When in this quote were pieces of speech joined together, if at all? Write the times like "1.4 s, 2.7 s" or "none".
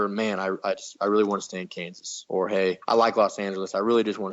2.4 s